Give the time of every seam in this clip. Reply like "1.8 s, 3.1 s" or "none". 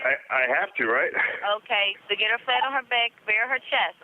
2.0 s